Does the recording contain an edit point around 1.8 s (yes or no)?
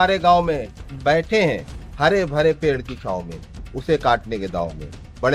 no